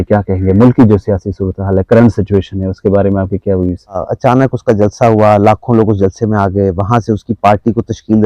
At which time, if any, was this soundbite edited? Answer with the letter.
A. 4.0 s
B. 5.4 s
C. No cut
A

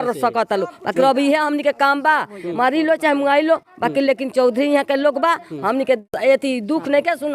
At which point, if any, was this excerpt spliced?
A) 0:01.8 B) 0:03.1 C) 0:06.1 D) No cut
C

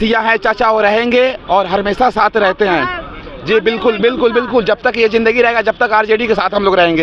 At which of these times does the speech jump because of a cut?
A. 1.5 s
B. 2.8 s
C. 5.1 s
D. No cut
D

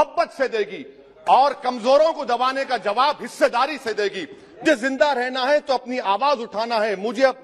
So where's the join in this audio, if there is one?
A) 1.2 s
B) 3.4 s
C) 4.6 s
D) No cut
C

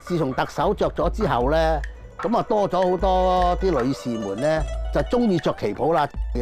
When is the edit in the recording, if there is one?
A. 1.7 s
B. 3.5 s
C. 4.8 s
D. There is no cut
C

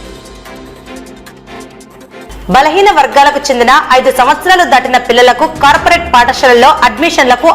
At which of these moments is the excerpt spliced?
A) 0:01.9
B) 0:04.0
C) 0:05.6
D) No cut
A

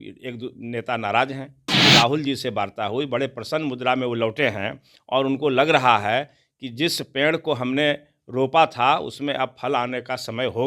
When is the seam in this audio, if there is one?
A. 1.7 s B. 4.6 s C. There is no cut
A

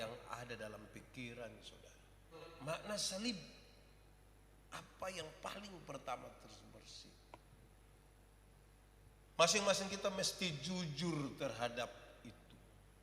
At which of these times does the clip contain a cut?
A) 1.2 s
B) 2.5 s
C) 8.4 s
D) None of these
B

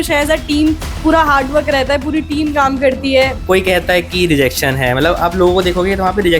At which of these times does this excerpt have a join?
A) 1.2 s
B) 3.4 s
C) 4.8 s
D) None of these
B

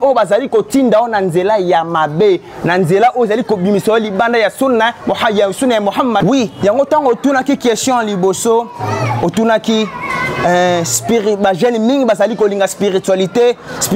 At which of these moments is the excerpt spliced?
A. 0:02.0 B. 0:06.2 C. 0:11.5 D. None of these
B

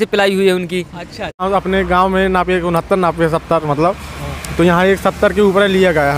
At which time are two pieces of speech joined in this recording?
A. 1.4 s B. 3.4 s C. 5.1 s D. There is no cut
A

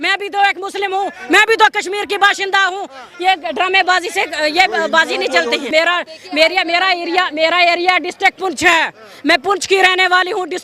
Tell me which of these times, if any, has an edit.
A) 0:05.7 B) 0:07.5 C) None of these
A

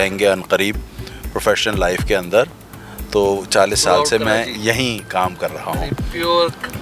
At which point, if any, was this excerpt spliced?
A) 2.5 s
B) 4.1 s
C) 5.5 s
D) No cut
D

